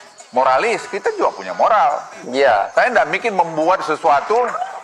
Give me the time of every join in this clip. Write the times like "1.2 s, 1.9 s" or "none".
none